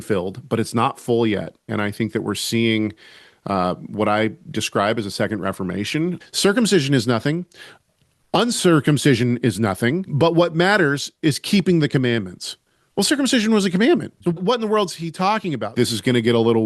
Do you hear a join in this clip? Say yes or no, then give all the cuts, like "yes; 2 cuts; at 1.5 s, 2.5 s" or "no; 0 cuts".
yes; 5 cuts; at 1.7 s, 6.2 s, 10.1 s, 14.4 s, 15.7 s